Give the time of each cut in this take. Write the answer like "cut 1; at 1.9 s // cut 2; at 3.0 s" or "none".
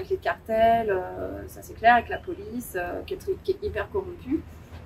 none